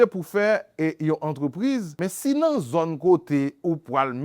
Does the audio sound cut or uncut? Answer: cut